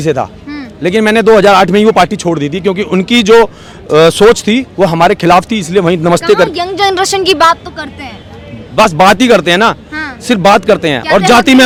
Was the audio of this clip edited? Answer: no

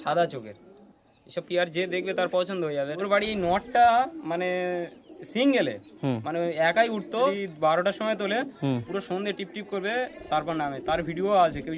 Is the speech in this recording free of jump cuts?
no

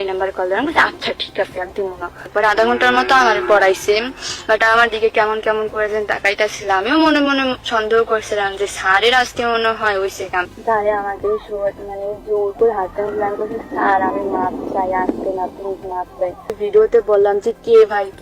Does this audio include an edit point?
yes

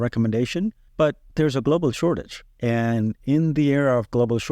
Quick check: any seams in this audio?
yes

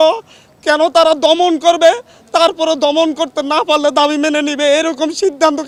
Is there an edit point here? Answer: no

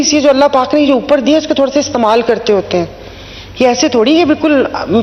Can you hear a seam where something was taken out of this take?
no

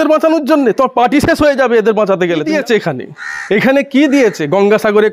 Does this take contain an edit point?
yes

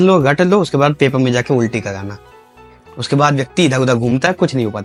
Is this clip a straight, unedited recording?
yes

